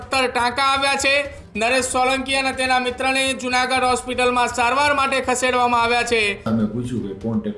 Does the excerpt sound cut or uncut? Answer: cut